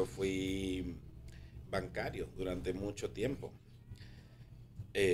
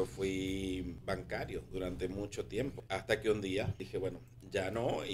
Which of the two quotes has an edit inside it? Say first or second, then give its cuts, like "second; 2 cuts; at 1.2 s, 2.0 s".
second; 3 cuts; at 1.0 s, 2.8 s, 3.8 s